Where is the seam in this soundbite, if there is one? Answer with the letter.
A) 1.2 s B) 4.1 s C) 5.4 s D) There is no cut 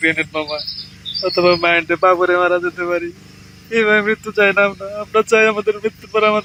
D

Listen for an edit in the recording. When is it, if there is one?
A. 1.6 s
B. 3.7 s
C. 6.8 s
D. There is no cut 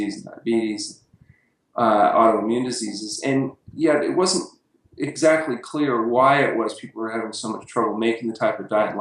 C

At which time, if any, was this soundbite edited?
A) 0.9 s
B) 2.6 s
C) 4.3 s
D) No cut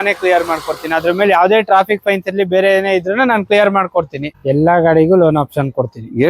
C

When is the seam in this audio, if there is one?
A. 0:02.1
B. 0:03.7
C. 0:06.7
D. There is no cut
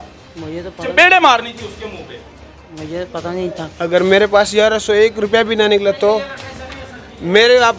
B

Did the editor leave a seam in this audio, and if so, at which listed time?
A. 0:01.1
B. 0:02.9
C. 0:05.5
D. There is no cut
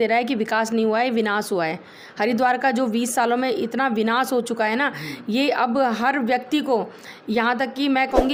D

